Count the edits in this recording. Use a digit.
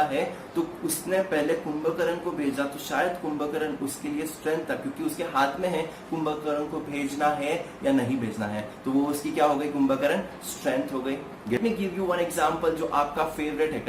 1